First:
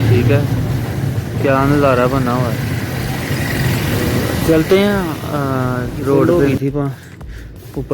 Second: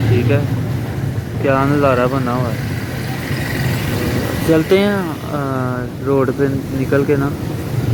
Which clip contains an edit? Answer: first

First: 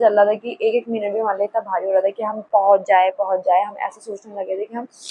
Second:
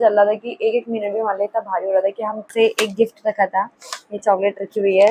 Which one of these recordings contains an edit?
second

